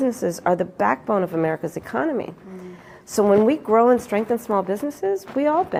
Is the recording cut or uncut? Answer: uncut